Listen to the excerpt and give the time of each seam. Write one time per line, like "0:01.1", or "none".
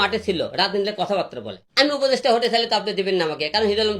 0:01.6